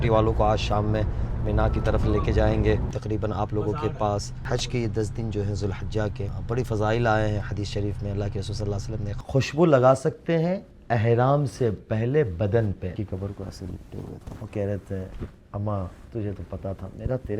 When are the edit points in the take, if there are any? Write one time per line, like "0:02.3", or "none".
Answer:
0:02.9
0:04.3
0:06.3
0:09.1
0:12.9
0:14.2